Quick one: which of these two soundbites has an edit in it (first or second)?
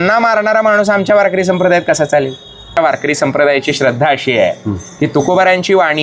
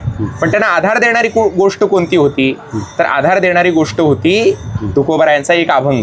first